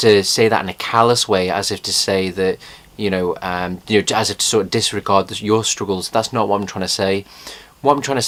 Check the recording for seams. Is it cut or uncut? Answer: uncut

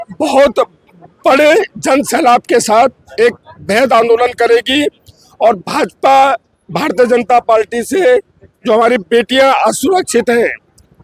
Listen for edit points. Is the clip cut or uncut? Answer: uncut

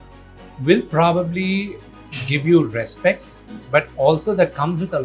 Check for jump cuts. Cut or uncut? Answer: uncut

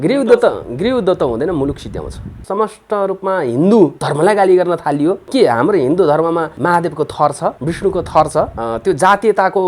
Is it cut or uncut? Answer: cut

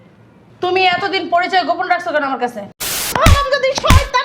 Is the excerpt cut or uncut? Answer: cut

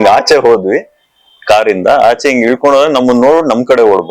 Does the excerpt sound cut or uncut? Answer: uncut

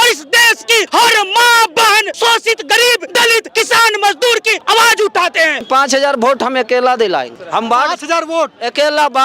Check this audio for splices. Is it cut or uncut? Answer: cut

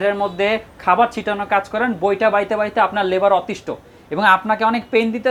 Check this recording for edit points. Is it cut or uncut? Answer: uncut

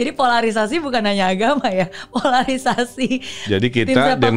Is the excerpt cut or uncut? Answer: uncut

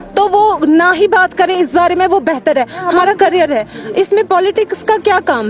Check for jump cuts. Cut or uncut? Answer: cut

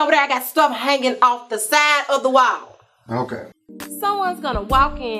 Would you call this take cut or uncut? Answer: uncut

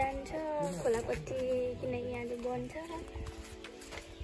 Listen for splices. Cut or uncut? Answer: uncut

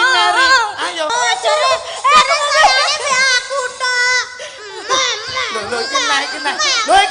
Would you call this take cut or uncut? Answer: cut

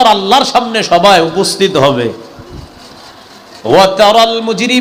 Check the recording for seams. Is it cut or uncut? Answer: uncut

